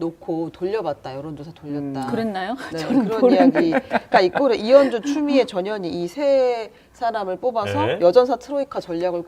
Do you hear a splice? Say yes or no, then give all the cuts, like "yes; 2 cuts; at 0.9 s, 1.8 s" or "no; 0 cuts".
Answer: no; 0 cuts